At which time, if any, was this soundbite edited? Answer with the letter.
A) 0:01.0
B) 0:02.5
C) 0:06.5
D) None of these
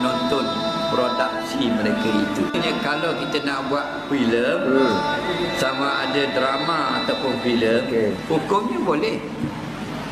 B